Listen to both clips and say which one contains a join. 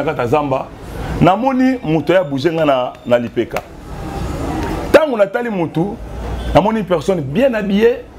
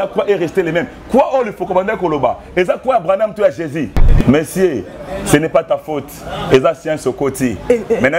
second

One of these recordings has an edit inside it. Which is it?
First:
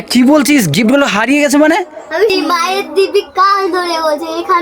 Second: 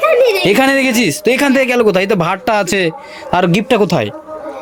first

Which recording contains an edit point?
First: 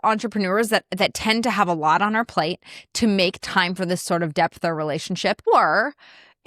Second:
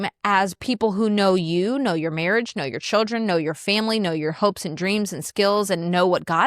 first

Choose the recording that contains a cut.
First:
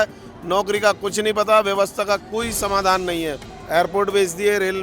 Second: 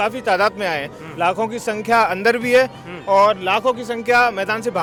first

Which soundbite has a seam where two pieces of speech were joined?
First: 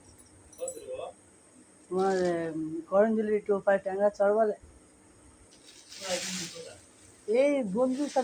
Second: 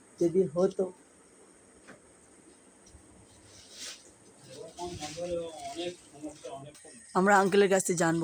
second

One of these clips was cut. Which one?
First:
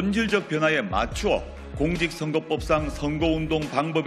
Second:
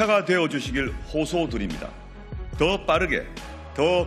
first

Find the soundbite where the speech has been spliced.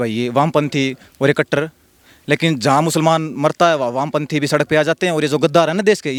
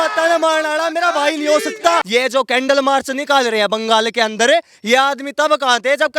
second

